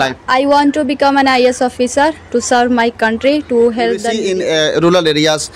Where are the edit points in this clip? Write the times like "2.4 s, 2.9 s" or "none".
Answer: 4.1 s